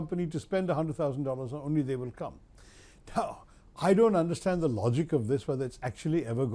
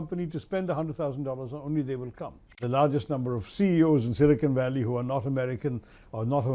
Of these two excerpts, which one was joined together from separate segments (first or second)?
second